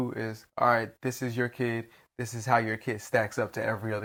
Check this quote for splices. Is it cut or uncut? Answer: uncut